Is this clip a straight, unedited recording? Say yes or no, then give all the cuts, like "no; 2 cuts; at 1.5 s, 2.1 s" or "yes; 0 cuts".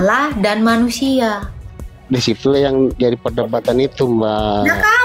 yes; 0 cuts